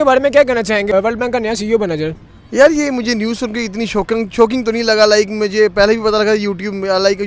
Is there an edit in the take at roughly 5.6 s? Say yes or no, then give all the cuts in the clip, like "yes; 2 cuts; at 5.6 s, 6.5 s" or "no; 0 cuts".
no; 1 cut; at 0.9 s